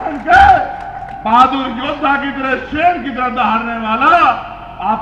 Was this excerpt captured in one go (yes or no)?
yes